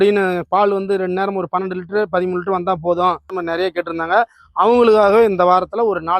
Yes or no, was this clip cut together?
yes